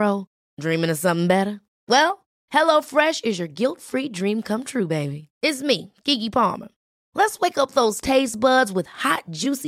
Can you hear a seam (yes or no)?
no